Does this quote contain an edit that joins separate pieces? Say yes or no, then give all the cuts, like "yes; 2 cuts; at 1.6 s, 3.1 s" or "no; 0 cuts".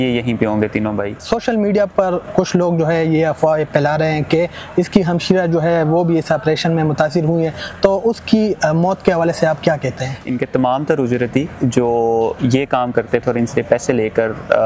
yes; 2 cuts; at 1.2 s, 10.2 s